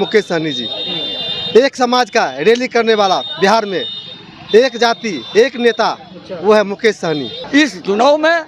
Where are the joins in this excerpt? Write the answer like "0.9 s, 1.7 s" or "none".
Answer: 7.3 s